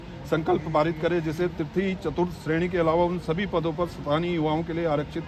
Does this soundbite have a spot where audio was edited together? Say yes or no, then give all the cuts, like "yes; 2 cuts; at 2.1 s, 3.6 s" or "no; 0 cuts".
no; 0 cuts